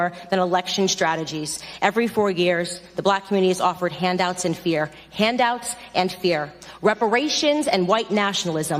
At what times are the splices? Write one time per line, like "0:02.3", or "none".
none